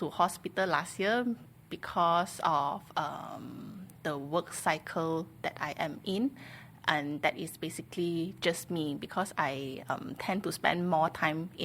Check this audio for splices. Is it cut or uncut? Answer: uncut